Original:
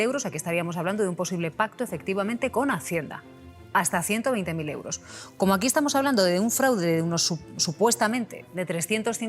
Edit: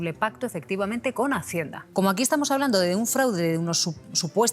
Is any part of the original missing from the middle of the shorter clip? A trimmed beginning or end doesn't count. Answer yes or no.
yes